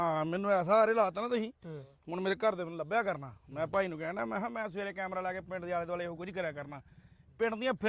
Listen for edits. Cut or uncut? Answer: uncut